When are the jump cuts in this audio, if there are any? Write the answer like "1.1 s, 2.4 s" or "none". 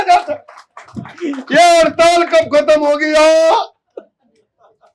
none